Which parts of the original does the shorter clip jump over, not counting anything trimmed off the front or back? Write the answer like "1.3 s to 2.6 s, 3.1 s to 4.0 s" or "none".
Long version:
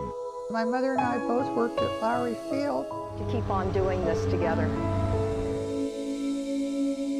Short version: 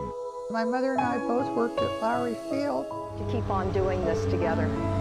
none